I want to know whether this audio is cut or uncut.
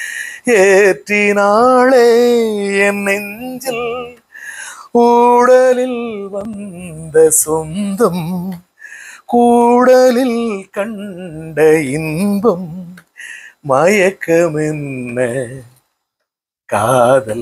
uncut